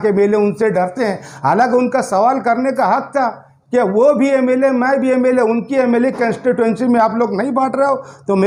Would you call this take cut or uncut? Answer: uncut